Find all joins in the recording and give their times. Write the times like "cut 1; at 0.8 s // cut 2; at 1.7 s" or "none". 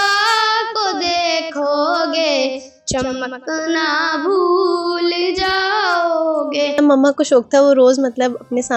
cut 1; at 6.8 s